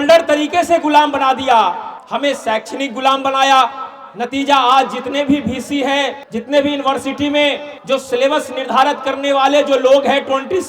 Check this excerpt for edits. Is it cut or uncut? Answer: uncut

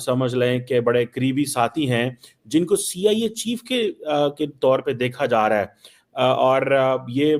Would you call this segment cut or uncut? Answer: uncut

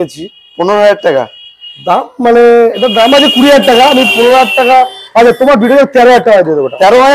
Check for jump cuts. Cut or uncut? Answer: uncut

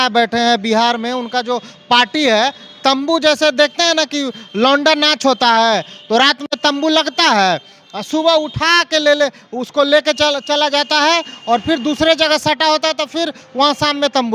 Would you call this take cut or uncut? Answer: uncut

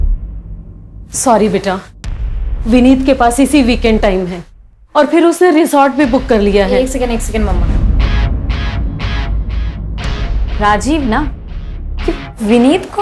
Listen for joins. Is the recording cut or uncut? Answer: uncut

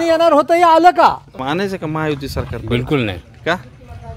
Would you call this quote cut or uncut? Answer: cut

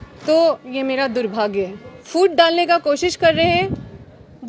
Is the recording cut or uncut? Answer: cut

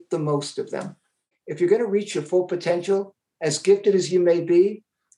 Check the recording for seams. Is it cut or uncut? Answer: cut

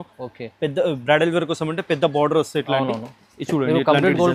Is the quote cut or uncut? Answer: uncut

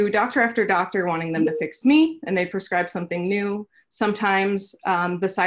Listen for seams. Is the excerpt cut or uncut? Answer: uncut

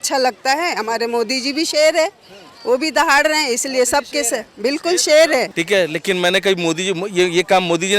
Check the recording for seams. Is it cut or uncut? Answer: cut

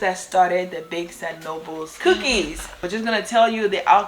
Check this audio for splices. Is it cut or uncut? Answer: cut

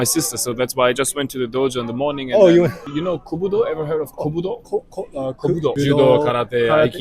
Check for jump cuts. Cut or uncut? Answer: cut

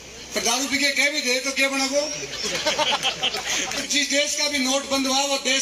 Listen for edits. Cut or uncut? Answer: cut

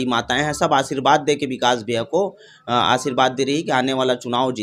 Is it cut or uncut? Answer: uncut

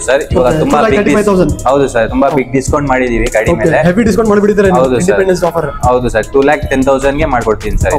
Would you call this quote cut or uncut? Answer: uncut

